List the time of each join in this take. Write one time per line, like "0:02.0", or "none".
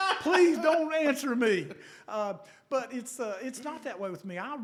none